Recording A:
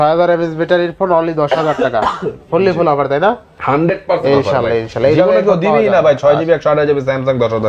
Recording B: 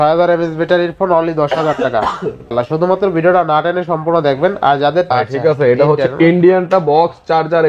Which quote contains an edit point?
B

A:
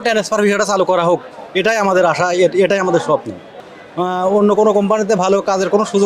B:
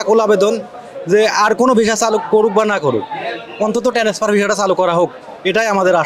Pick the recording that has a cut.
A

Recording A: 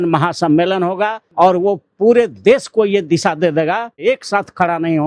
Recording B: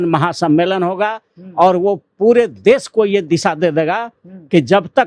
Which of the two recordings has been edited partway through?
A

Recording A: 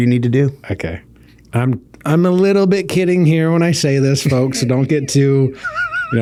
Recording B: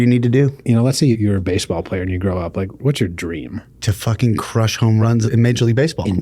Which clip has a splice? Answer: B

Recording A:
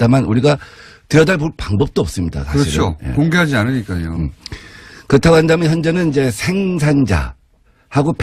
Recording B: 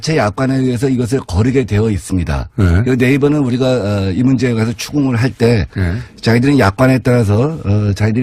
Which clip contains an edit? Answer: B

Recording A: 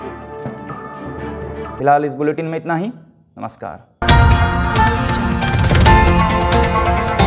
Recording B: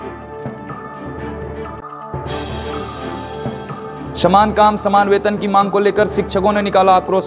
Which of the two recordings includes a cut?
B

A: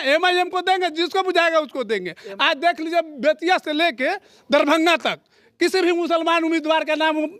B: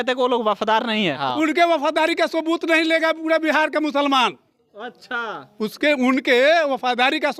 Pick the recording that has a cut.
B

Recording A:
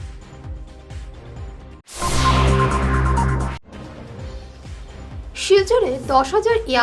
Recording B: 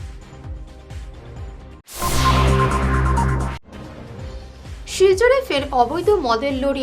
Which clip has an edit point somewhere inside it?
B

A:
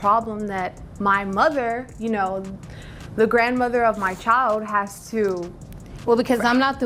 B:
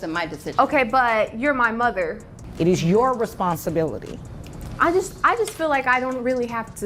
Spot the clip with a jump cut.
B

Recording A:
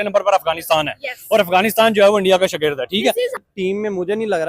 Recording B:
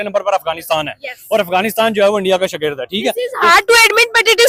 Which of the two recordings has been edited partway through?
A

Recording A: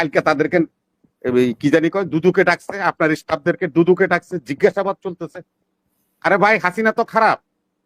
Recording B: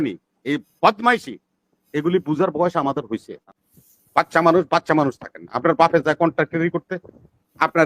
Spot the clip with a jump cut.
B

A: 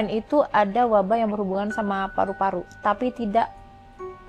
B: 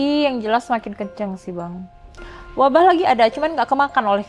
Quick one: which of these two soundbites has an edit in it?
B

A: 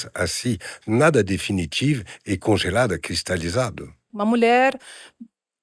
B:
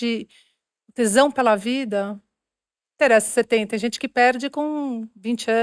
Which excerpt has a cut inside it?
A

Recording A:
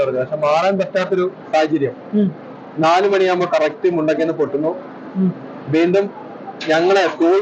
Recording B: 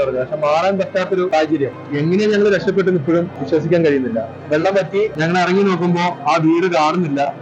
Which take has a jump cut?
B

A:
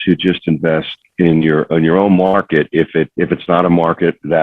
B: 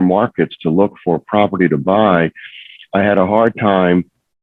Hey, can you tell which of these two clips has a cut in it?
A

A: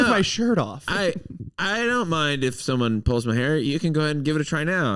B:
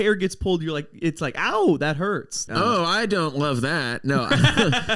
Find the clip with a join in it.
B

